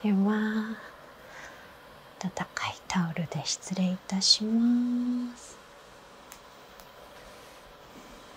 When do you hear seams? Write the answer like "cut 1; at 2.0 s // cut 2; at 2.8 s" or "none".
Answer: none